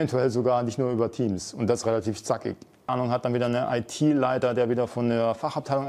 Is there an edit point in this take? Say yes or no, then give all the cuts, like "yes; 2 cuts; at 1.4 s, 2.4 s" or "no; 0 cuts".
yes; 1 cut; at 2.9 s